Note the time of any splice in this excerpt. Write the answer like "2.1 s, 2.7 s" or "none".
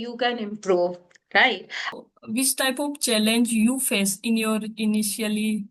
1.9 s